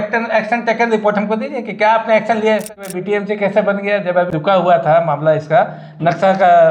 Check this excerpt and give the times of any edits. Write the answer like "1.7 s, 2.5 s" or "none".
2.9 s, 4.3 s